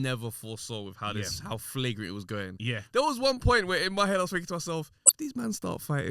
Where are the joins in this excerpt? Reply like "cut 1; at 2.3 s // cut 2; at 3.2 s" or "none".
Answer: cut 1; at 5.0 s